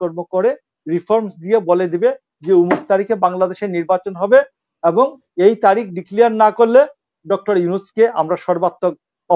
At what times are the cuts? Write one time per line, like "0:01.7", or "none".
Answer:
none